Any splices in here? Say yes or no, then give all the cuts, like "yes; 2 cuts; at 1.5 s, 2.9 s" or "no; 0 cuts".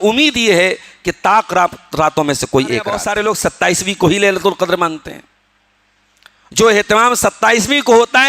yes; 1 cut; at 3.0 s